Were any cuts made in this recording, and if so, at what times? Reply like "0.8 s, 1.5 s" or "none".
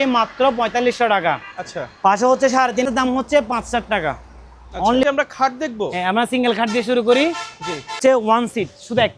2.9 s, 5.0 s, 8.0 s